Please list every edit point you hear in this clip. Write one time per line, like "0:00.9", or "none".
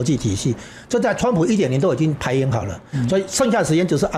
none